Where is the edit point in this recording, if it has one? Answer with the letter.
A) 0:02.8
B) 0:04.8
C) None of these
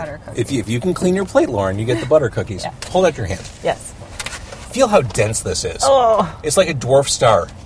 A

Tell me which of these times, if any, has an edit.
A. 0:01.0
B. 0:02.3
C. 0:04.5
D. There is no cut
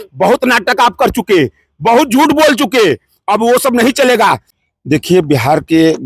C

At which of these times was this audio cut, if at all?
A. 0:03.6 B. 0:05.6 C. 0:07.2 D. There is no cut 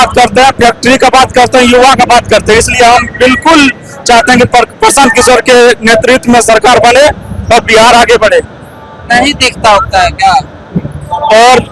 D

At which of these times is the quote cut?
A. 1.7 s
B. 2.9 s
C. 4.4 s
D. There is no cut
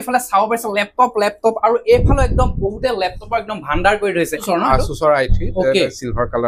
D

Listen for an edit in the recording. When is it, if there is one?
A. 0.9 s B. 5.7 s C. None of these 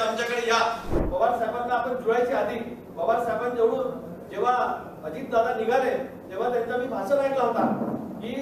A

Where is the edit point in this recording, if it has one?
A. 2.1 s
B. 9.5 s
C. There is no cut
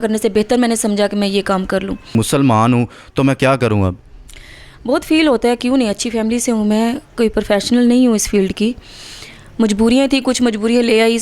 A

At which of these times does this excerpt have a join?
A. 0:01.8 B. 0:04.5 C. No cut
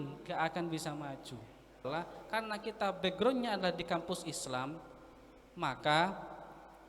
A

